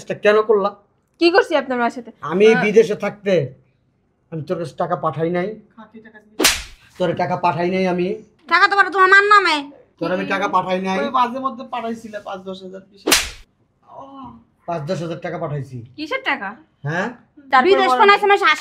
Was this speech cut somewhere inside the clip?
yes; 3 cuts; at 8.3 s, 9.8 s, 17.5 s

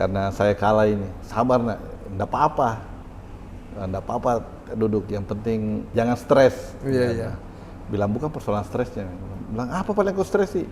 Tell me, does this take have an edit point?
yes; 2 cuts; at 1.2 s, 5.9 s

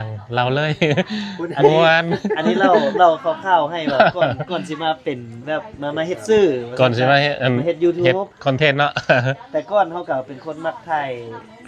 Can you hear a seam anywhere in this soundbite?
no; 0 cuts

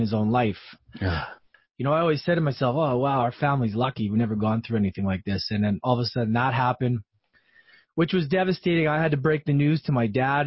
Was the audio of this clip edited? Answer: yes; 1 cut; at 1.3 s

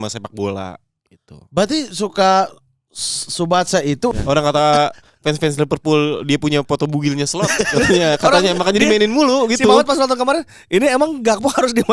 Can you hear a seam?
yes; 1 cut; at 4.1 s

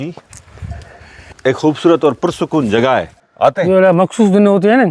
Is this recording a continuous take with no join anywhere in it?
no; 2 cuts; at 1.3 s, 3.2 s

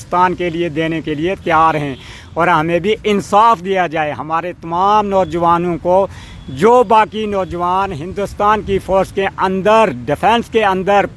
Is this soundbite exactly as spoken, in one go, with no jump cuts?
yes; 0 cuts

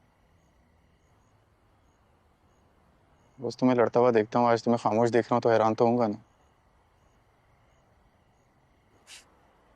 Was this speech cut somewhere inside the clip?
yes; 1 cut; at 0.9 s

